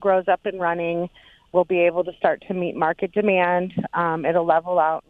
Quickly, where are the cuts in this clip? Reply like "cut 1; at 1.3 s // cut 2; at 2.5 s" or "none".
cut 1; at 1.4 s